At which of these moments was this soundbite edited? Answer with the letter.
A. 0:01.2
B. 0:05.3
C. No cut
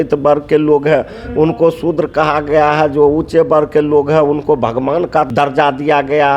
B